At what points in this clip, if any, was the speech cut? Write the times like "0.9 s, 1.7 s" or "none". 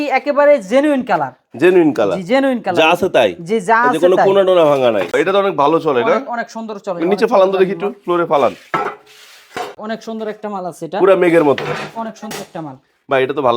5.1 s, 9.8 s